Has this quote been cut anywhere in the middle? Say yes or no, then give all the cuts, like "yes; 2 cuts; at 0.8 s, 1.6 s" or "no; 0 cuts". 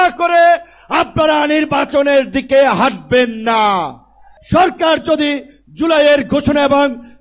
yes; 1 cut; at 4.3 s